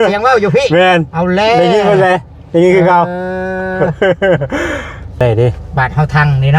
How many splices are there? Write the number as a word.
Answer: one